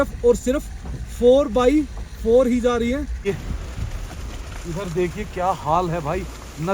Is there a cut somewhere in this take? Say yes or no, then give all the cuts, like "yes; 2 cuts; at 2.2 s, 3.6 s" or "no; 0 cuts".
yes; 1 cut; at 3.1 s